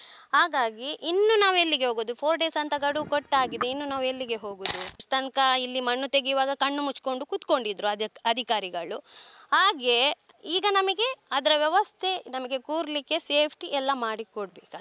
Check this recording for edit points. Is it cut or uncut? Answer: cut